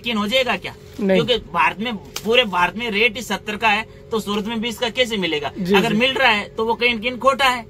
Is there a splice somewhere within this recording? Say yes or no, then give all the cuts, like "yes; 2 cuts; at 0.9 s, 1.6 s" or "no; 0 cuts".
no; 0 cuts